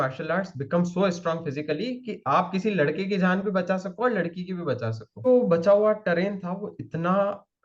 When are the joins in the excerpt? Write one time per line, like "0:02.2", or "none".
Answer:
0:05.3